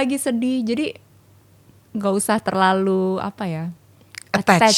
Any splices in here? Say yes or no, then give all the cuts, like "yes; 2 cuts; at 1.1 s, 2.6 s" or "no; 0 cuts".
no; 0 cuts